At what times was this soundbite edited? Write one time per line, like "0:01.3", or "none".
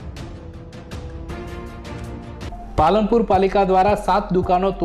none